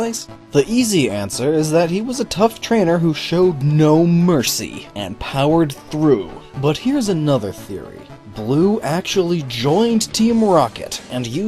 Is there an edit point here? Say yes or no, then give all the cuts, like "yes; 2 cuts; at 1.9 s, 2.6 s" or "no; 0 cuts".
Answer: yes; 1 cut; at 7.7 s